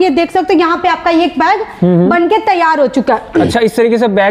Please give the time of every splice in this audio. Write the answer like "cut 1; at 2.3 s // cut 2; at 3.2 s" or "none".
none